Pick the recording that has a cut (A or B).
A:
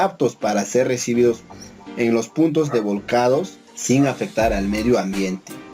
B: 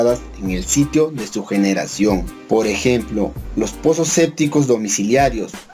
A